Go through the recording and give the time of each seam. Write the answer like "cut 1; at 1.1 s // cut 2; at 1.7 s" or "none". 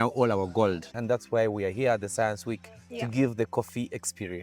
cut 1; at 0.9 s